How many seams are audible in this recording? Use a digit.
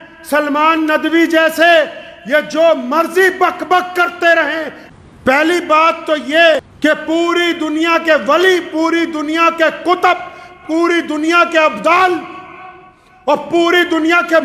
2